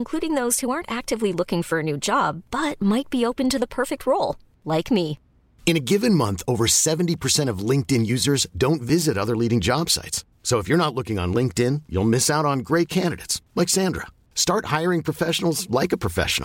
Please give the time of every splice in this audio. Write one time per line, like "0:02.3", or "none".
none